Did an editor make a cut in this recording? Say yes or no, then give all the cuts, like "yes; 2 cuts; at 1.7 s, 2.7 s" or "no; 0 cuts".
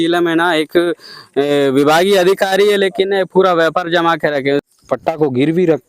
yes; 1 cut; at 4.7 s